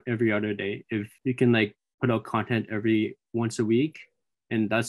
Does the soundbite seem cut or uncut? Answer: cut